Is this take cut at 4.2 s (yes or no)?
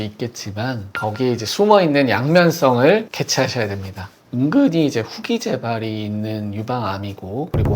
yes